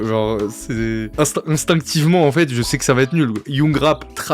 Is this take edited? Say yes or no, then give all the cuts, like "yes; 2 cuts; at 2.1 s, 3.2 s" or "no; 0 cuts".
yes; 1 cut; at 3.4 s